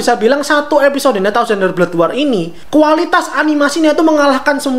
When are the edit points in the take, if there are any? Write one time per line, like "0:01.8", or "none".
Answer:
0:02.6